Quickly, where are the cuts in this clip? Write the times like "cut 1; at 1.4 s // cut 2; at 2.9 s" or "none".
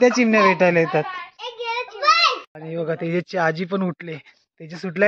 cut 1; at 2.6 s